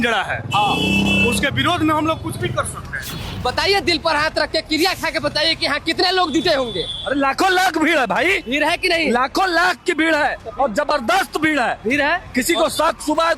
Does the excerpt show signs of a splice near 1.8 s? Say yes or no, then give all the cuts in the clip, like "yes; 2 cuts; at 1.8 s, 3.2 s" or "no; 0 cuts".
no; 1 cut; at 3.3 s